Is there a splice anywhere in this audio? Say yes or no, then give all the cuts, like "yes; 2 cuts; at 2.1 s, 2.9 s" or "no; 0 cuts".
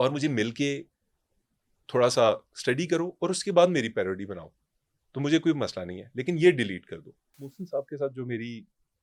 yes; 1 cut; at 7.4 s